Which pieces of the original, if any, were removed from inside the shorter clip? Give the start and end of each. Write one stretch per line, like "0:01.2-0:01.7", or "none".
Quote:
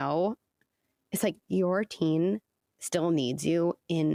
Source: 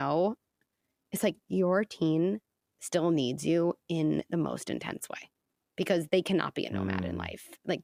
none